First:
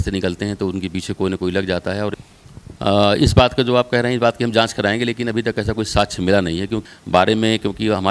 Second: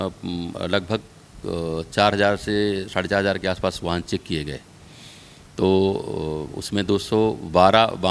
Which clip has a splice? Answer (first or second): first